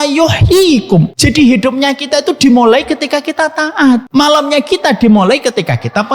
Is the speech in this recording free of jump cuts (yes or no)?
no